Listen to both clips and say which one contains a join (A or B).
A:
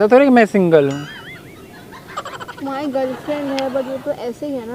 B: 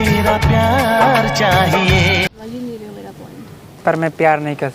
B